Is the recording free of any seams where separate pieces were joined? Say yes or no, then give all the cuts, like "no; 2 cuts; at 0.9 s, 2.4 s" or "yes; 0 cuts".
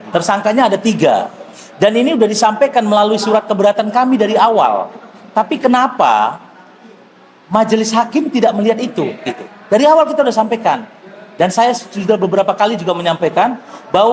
yes; 0 cuts